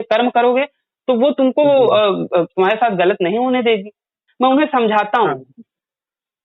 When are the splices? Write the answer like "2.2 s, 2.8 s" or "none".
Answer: 4.2 s